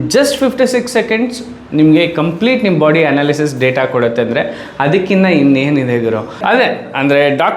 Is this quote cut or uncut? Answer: cut